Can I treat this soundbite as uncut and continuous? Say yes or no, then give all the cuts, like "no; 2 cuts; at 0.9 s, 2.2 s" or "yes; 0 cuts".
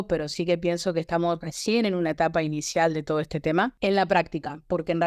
no; 1 cut; at 3.8 s